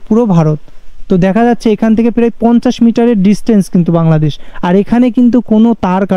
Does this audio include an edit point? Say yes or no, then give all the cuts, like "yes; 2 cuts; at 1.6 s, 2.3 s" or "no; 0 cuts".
no; 0 cuts